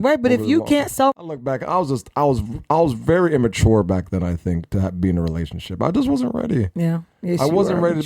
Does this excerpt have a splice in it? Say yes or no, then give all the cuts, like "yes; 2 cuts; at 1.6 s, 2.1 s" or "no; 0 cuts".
yes; 1 cut; at 1.3 s